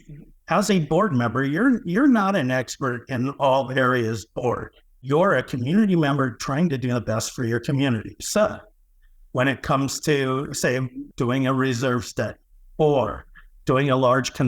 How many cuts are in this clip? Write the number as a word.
two